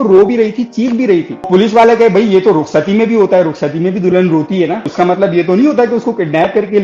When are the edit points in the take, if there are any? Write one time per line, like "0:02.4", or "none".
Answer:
0:01.5
0:04.9